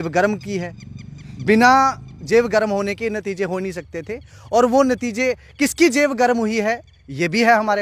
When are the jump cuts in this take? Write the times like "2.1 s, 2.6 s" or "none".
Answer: none